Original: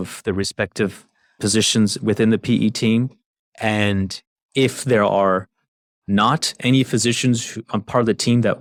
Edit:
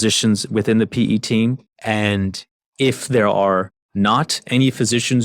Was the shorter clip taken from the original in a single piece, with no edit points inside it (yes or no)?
no